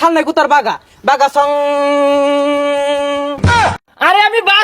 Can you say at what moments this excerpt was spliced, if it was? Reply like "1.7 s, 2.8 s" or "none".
3.6 s